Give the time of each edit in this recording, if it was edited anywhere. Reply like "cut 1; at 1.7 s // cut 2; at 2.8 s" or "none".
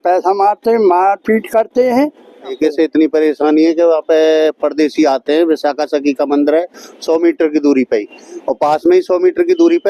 cut 1; at 2.5 s